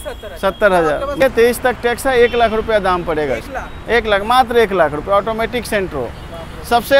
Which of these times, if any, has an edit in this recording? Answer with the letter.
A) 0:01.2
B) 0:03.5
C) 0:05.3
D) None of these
A